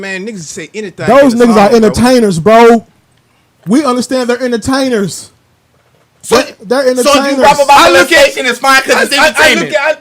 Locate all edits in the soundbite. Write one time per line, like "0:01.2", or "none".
none